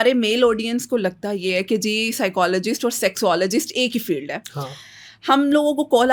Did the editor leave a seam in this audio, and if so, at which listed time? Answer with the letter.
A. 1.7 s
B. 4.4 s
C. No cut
C